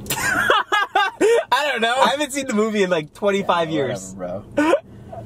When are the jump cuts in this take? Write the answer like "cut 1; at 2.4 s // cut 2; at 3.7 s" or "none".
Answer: cut 1; at 2.1 s